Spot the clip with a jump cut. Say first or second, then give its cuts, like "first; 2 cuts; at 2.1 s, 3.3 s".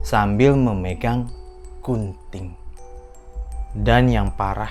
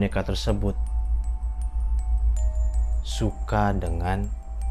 first; 1 cut; at 3.5 s